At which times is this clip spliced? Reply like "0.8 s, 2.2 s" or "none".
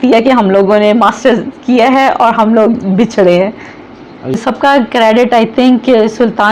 4.3 s